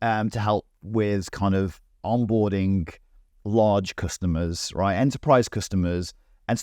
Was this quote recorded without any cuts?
yes; 0 cuts

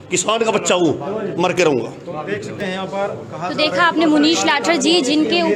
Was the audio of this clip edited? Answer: no; 0 cuts

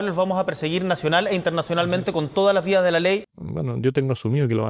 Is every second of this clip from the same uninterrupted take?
no; 1 cut; at 3.4 s

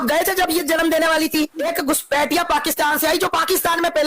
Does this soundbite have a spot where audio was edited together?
yes; 1 cut; at 1.6 s

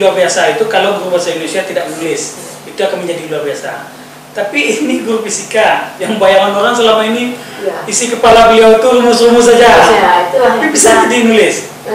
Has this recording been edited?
no; 0 cuts

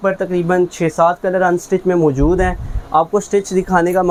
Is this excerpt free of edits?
yes; 0 cuts

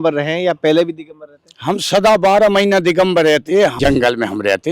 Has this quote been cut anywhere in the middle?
yes; 1 cut; at 3.7 s

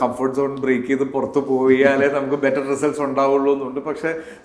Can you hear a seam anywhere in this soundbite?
no; 0 cuts

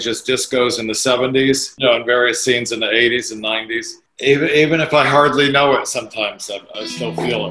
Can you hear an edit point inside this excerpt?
no; 0 cuts

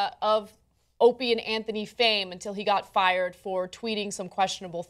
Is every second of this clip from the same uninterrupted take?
no; 1 cut; at 1.1 s

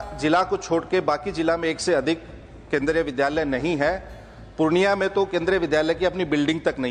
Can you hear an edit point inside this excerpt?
no; 0 cuts

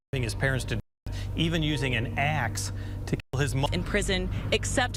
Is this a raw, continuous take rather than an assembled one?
yes; 0 cuts

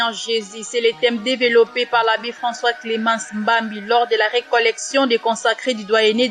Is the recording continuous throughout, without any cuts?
yes; 0 cuts

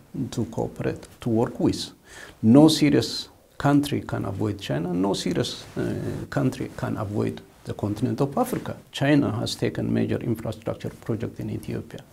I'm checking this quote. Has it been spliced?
no; 0 cuts

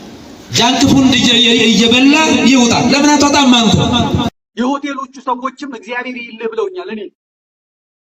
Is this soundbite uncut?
no; 1 cut; at 4.3 s

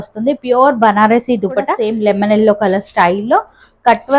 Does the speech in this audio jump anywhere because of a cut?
yes; 1 cut; at 1.8 s

